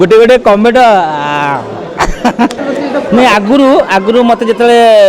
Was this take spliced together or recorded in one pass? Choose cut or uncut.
cut